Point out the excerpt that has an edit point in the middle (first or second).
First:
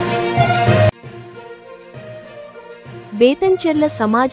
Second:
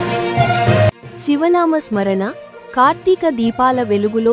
first